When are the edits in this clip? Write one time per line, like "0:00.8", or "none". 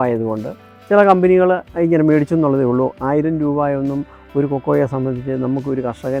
none